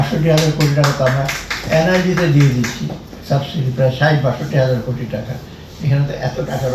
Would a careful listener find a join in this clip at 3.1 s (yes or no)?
no